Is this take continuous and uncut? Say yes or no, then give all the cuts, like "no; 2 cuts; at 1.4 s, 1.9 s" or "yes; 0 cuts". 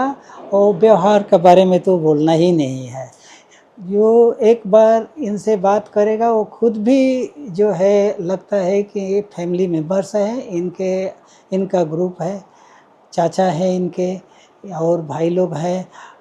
yes; 0 cuts